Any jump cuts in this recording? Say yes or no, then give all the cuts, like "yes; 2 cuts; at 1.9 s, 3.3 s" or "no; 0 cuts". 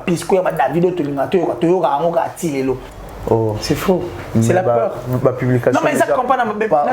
yes; 1 cut; at 2.9 s